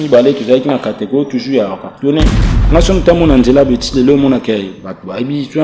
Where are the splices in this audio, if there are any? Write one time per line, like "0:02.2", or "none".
0:02.5